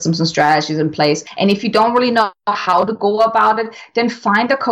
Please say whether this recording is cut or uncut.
cut